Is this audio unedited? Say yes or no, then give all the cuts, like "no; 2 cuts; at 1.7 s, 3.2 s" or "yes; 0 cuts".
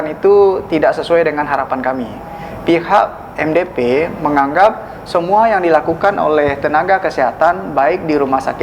yes; 0 cuts